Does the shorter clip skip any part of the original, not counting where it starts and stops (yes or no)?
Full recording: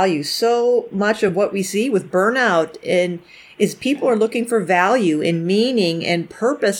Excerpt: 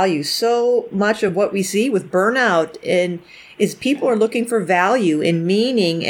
no